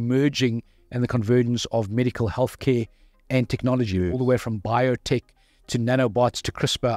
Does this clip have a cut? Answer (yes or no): no